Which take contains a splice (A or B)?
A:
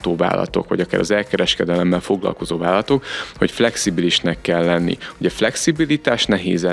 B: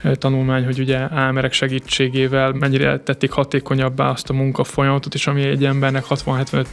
B